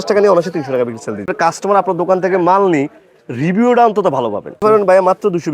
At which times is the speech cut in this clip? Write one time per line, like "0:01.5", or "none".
0:01.2
0:04.6